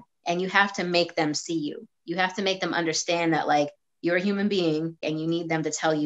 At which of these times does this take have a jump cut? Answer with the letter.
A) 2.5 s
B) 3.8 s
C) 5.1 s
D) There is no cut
C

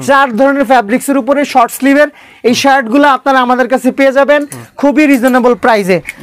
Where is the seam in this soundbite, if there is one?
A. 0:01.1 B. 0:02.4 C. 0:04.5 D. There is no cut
D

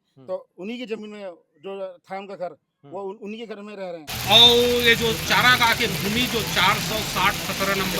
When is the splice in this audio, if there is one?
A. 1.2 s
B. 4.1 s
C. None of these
B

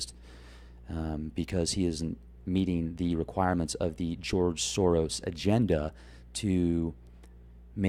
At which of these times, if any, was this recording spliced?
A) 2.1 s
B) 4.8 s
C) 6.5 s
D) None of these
B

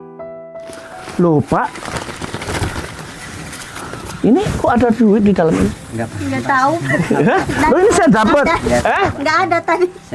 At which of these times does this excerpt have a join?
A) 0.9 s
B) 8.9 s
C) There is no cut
A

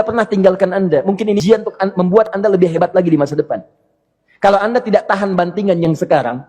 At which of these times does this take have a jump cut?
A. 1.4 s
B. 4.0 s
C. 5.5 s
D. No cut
A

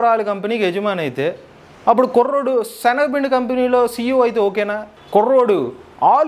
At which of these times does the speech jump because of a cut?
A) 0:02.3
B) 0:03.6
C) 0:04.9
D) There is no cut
C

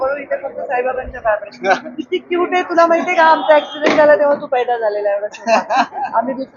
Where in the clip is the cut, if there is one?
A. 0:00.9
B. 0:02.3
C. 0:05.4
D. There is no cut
D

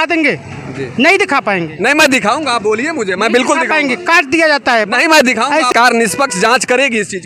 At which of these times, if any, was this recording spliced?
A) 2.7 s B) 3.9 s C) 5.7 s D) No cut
C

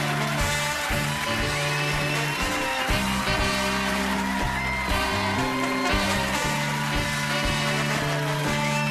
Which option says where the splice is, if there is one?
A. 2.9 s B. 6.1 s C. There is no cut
A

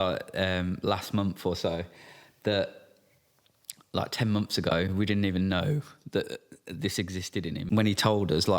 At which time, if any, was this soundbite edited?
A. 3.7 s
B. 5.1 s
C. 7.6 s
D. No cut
C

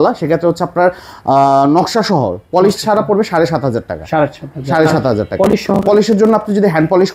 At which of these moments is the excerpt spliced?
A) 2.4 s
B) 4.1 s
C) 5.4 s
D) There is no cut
D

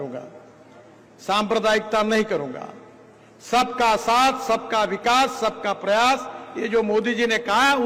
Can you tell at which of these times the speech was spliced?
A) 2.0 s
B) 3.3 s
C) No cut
C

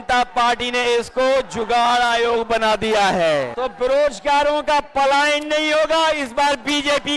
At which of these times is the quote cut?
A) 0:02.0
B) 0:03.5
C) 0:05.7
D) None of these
B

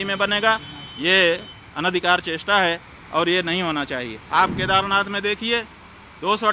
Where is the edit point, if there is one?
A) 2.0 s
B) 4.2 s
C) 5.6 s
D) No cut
B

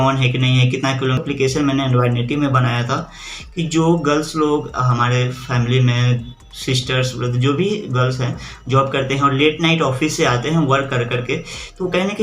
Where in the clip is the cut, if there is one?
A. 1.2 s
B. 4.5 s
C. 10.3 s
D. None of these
A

